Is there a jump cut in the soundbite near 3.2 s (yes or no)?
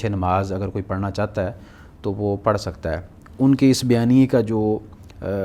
yes